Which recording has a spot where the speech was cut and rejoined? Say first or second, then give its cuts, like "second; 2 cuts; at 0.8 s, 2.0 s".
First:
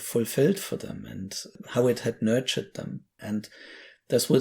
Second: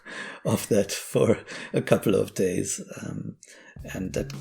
first; 2 cuts; at 1.6 s, 3.2 s